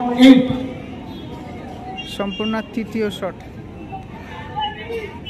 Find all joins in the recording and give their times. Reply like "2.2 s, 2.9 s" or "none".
4.2 s